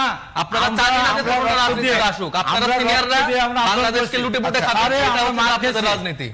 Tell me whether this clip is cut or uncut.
uncut